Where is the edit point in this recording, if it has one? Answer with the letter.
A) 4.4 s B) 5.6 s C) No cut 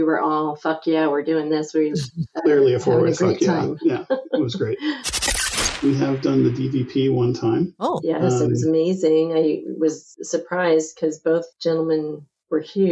B